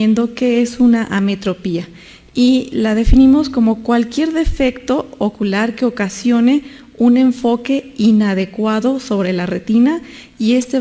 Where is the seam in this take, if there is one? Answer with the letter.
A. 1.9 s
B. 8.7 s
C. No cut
B